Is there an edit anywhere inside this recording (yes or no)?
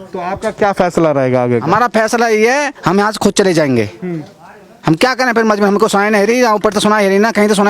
no